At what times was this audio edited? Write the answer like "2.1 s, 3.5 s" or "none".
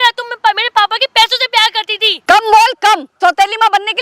2.1 s, 3.2 s